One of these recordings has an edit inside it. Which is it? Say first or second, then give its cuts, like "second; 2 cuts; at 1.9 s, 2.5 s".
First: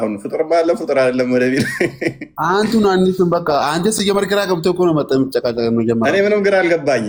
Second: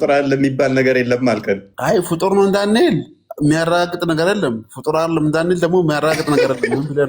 second; 1 cut; at 1.7 s